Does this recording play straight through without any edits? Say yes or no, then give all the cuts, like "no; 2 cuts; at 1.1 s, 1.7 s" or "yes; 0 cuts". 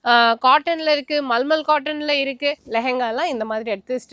no; 1 cut; at 2.6 s